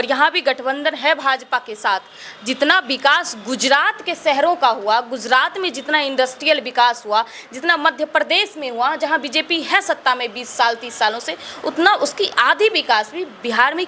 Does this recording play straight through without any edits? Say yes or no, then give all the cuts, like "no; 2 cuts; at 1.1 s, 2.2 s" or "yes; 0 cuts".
yes; 0 cuts